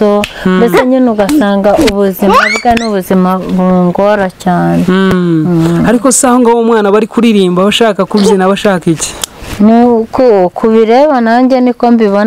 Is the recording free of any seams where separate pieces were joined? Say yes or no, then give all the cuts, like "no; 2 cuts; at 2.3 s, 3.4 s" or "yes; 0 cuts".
yes; 0 cuts